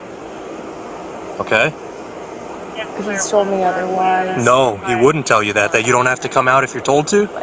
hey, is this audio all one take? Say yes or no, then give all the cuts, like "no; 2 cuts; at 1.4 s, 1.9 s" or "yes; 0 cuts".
yes; 0 cuts